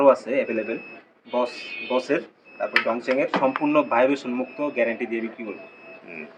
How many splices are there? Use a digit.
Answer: 0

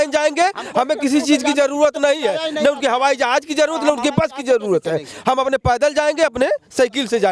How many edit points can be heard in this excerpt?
0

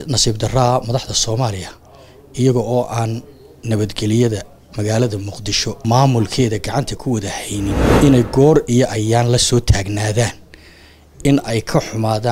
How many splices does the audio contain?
2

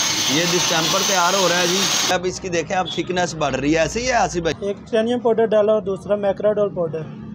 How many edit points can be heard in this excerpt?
2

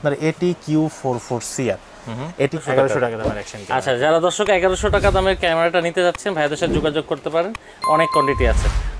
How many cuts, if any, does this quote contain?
1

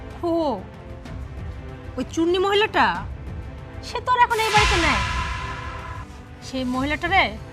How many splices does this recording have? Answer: 0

